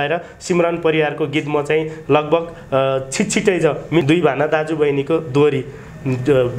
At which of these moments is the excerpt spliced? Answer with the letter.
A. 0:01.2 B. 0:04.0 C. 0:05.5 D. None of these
B